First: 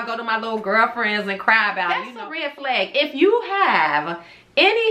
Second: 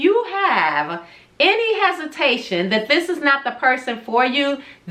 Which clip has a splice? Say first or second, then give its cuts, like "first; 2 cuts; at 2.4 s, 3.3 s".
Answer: first; 1 cut; at 2.1 s